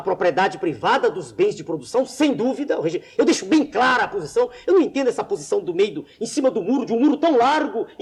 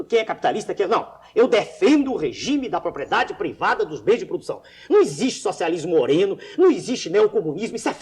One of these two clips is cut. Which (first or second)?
second